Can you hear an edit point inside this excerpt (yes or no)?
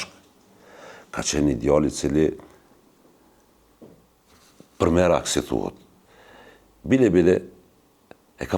no